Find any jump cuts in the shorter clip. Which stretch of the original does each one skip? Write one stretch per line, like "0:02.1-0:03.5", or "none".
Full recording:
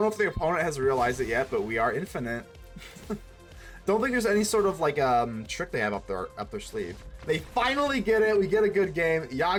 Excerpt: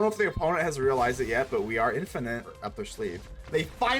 0:02.6-0:06.3